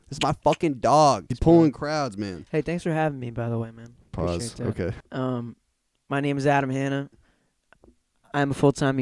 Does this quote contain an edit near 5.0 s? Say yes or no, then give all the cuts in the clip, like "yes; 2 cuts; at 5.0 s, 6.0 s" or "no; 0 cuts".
yes; 2 cuts; at 1.3 s, 5.0 s